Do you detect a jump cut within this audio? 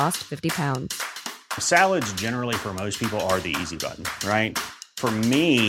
no; 0 cuts

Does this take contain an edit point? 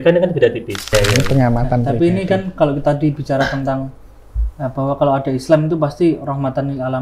yes; 1 cut; at 0.9 s

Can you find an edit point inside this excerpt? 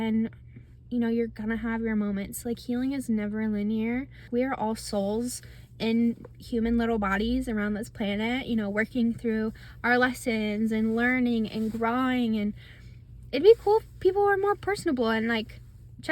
yes; 1 cut; at 4.3 s

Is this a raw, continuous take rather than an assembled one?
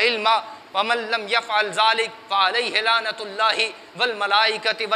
yes; 0 cuts

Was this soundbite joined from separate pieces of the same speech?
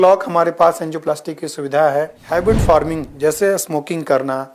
yes; 1 cut; at 2.2 s

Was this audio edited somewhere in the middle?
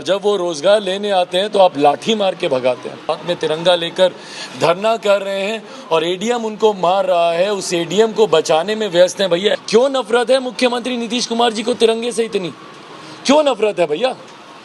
yes; 2 cuts; at 3.1 s, 9.6 s

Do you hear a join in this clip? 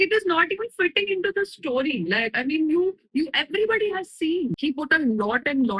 yes; 1 cut; at 4.6 s

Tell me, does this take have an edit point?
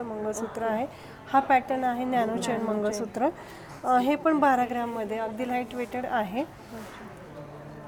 no; 0 cuts

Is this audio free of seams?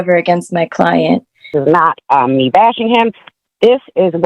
no; 1 cut; at 1.5 s

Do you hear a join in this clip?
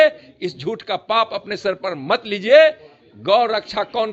no; 0 cuts

